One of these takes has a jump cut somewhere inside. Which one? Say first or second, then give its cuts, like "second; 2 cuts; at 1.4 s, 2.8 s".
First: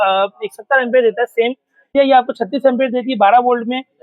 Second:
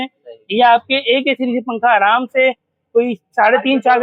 first; 1 cut; at 1.9 s